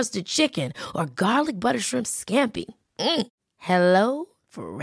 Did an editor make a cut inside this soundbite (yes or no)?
no